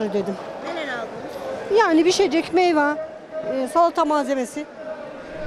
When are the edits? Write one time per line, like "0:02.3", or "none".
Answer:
none

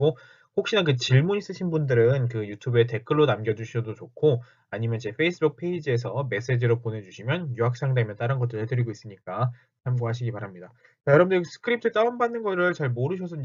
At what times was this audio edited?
none

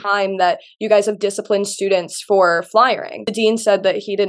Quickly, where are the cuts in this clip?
0:03.3

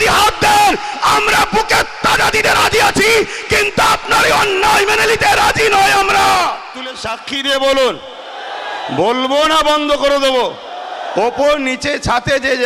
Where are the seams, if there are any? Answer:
0:07.3

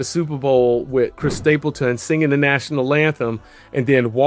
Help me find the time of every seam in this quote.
0:01.2

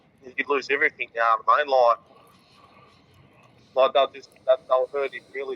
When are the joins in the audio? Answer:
none

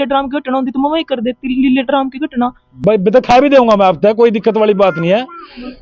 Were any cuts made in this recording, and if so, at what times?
0:02.8

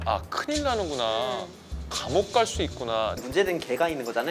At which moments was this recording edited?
0:03.2

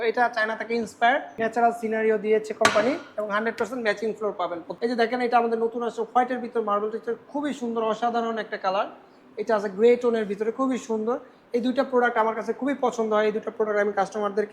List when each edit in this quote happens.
0:01.3
0:04.7

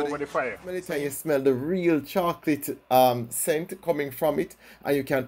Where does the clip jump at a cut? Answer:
0:01.0

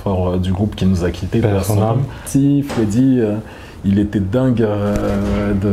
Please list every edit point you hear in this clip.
0:02.2

